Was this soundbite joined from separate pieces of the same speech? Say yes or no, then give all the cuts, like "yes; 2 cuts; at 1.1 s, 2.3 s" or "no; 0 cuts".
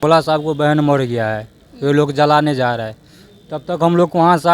no; 0 cuts